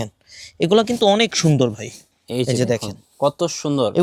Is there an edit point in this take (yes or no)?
no